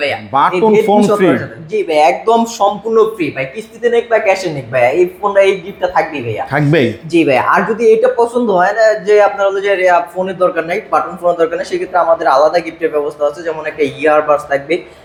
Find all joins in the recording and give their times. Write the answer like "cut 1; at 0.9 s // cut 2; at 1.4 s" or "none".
none